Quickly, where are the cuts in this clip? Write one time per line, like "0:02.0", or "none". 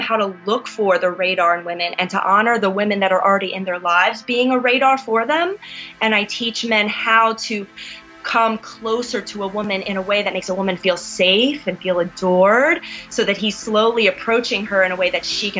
none